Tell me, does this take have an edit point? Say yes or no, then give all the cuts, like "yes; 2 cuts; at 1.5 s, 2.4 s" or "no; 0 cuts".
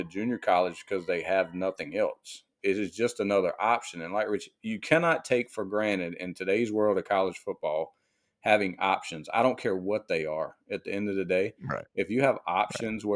yes; 1 cut; at 2.5 s